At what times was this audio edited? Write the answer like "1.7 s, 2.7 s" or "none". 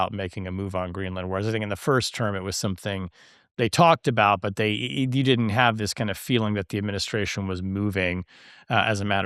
none